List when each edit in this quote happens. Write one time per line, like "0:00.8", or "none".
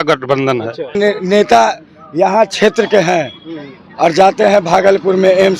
0:01.0